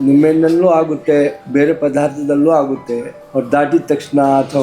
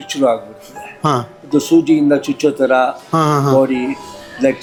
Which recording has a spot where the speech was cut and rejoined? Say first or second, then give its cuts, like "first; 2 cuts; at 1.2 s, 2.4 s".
first; 2 cuts; at 1.4 s, 3.2 s